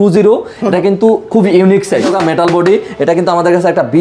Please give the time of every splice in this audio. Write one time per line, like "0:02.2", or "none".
0:02.1